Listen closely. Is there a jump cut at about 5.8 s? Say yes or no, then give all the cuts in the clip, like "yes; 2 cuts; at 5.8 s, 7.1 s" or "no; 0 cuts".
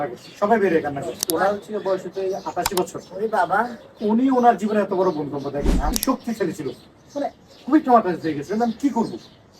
yes; 2 cuts; at 1.1 s, 5.8 s